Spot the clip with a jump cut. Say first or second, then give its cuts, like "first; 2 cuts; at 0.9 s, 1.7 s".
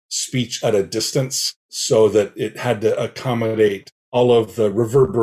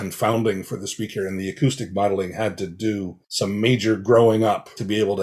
second; 1 cut; at 3.2 s